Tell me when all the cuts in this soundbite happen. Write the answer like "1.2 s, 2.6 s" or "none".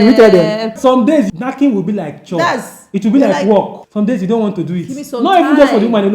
1.0 s, 3.8 s